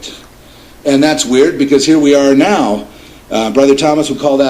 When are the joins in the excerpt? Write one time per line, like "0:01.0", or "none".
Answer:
0:01.5